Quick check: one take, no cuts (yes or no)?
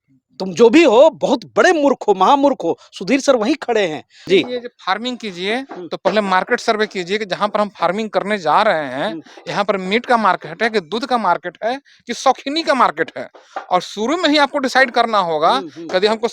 no